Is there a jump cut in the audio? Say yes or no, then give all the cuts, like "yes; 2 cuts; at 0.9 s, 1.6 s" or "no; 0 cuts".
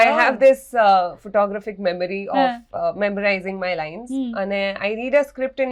no; 0 cuts